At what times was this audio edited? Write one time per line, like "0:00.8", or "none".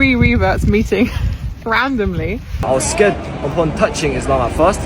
0:02.6